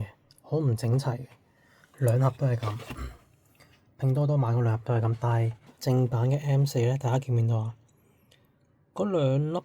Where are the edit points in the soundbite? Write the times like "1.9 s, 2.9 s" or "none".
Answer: 5.6 s